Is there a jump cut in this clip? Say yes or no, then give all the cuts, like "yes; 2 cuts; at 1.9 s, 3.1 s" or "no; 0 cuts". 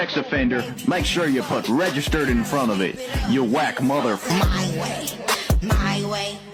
no; 0 cuts